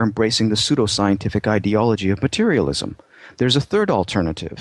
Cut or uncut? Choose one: uncut